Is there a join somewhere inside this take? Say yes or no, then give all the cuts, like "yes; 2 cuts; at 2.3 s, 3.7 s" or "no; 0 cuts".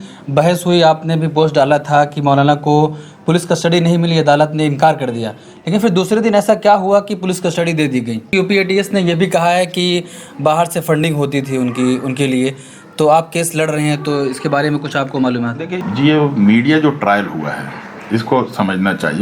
yes; 2 cuts; at 8.3 s, 15.8 s